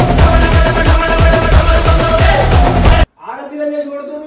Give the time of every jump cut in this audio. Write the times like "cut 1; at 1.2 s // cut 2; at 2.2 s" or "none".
cut 1; at 3.1 s